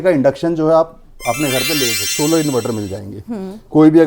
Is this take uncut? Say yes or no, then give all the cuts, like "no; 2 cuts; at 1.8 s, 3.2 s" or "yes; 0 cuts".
no; 1 cut; at 2.1 s